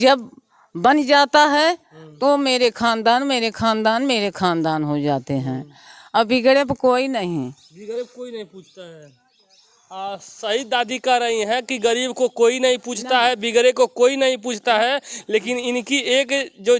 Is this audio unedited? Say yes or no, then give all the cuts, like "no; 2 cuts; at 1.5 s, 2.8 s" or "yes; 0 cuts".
yes; 0 cuts